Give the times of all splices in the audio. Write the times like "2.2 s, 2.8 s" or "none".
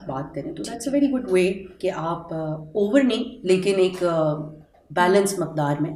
none